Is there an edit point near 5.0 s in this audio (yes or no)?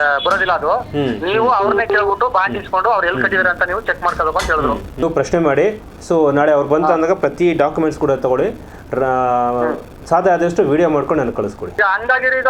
yes